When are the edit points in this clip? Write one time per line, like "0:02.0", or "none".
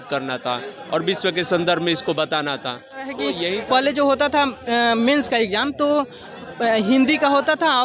0:03.5